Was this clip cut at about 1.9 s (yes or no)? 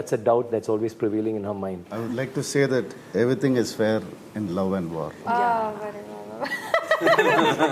yes